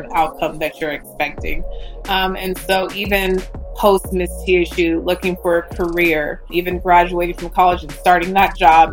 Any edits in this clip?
yes; 1 cut; at 6.5 s

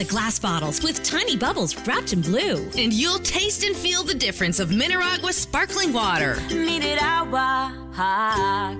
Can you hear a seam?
no; 0 cuts

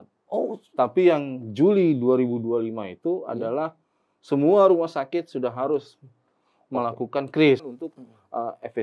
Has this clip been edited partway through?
yes; 1 cut; at 7.7 s

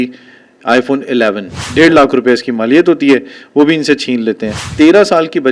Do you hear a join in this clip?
yes; 2 cuts; at 1.6 s, 4.6 s

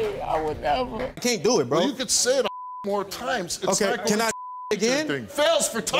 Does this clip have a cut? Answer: yes; 1 cut; at 1.1 s

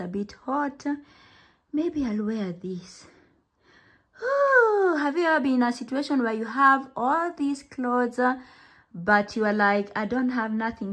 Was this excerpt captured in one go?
yes; 0 cuts

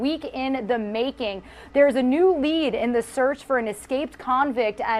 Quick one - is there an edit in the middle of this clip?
no; 0 cuts

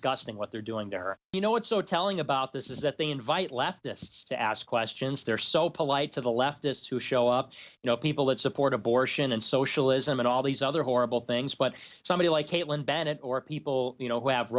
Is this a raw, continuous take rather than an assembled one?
no; 1 cut; at 1.3 s

